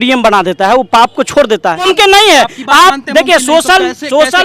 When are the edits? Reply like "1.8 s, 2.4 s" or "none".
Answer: 1.9 s